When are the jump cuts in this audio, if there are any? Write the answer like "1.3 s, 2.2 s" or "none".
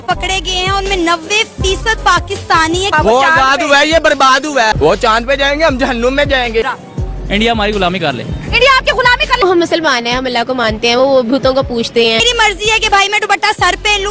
2.9 s, 4.8 s, 6.6 s, 9.4 s, 12.2 s

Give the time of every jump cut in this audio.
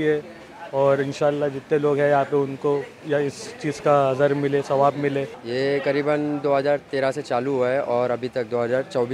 5.4 s

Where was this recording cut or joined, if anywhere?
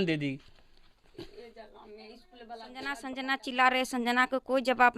3.0 s

